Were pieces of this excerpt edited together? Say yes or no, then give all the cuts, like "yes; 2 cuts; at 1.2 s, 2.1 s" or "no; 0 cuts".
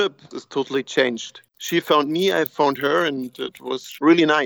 no; 0 cuts